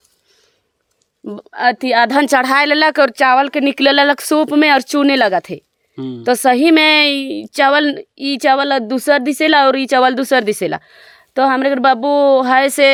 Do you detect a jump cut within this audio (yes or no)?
no